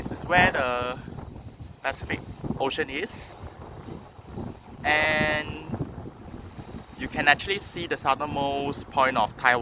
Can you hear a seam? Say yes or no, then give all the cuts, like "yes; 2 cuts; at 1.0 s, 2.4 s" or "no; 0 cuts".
no; 0 cuts